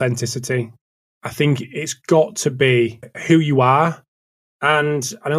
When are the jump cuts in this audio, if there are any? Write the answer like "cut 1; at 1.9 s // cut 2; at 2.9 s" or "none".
cut 1; at 3.1 s